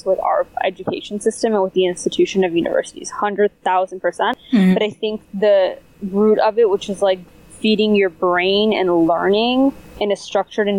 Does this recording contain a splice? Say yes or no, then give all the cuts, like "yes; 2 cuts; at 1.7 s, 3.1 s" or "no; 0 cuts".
yes; 2 cuts; at 4.3 s, 7.2 s